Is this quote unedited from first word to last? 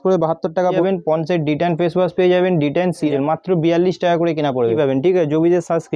no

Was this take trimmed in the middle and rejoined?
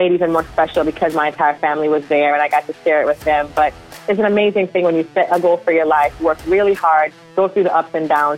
yes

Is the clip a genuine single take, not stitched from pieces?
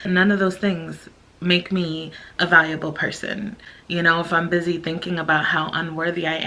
no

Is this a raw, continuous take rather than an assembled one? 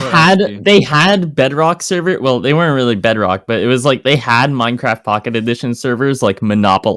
yes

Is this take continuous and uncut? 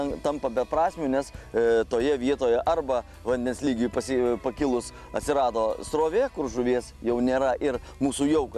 yes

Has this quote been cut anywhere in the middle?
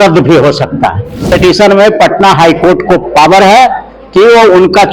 yes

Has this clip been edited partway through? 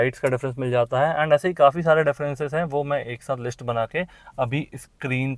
no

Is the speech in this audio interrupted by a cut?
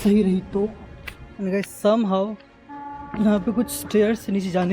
yes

